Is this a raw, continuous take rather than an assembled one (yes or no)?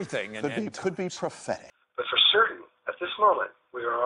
no